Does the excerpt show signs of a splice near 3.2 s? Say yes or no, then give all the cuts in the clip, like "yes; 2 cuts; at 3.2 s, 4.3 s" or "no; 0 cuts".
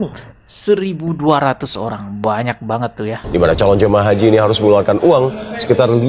yes; 1 cut; at 3.2 s